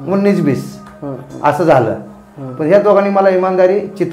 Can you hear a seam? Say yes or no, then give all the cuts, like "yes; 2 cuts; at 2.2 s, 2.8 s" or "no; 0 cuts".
no; 0 cuts